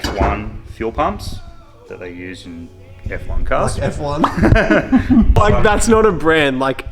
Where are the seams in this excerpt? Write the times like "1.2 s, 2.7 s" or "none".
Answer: 5.3 s